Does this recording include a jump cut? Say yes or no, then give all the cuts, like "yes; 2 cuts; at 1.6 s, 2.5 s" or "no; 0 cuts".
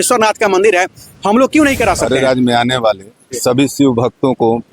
yes; 1 cut; at 2.0 s